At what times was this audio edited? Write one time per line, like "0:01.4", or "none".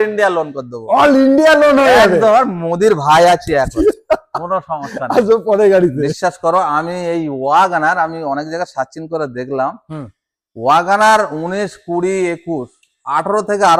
none